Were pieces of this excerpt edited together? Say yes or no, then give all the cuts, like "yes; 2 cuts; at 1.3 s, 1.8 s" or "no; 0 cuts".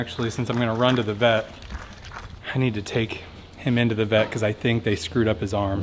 no; 0 cuts